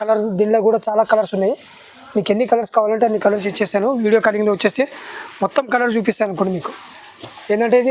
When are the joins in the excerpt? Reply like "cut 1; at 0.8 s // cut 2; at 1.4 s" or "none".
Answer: none